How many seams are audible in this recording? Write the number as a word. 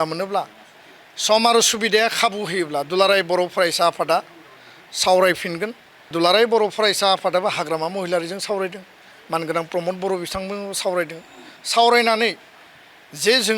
one